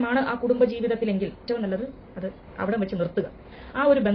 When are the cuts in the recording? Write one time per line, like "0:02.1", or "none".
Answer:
0:01.4